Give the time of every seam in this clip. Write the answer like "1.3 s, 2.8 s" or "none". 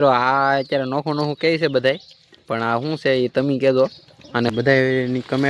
4.5 s